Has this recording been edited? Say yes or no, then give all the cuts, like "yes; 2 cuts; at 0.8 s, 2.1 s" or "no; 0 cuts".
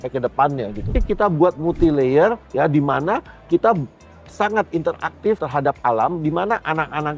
yes; 1 cut; at 0.9 s